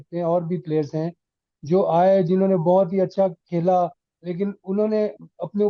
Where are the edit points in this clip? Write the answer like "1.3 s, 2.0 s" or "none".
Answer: none